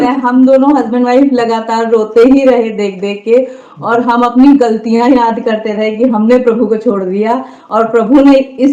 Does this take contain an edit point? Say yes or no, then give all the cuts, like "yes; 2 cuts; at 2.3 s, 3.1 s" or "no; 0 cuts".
no; 0 cuts